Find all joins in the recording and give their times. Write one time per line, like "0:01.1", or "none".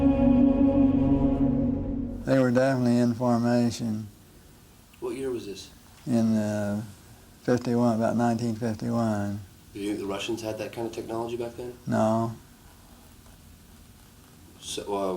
0:07.9